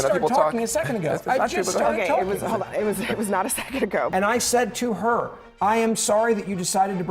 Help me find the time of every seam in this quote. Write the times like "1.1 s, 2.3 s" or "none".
4.1 s